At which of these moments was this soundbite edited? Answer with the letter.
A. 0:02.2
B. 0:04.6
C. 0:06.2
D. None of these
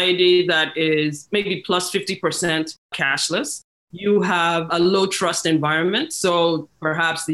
D